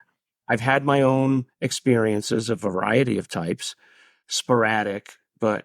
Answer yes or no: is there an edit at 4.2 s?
yes